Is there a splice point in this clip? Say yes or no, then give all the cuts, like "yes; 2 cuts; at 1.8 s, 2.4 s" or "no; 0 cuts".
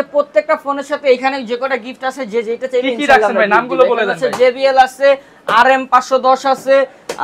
no; 0 cuts